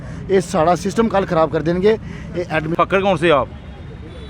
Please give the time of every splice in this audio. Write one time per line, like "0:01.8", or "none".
0:02.7